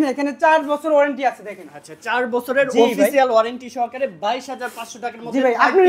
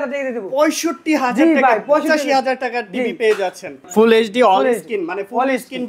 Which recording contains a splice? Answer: second; 1 cut; at 3.8 s

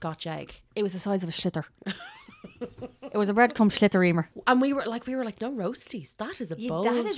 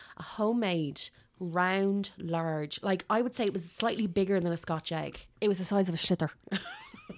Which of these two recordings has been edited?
first; 1 cut; at 4.3 s

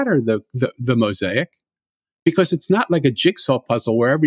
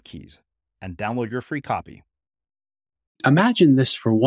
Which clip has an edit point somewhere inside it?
second; 1 cut; at 3.2 s

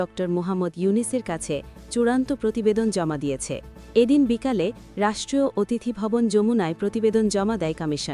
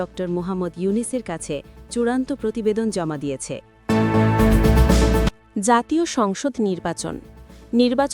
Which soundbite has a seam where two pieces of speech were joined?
second; 2 cuts; at 3.7 s, 4.9 s

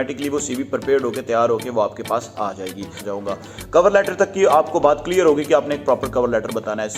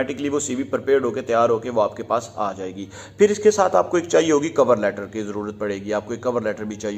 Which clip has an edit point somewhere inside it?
first; 1 cut; at 3.0 s

